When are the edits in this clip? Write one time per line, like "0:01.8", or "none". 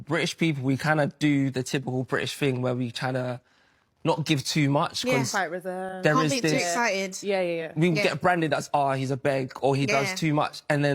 none

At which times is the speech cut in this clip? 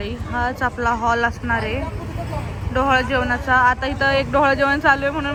none

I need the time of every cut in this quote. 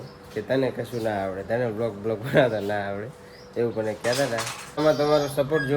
0:04.8

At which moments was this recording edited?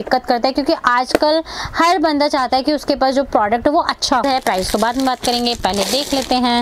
0:04.2

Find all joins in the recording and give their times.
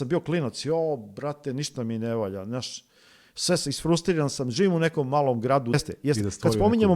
0:05.8

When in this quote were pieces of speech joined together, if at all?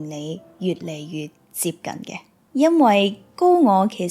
none

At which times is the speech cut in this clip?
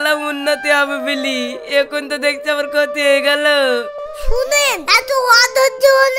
0:04.0

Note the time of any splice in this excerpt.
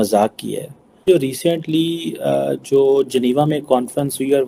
none

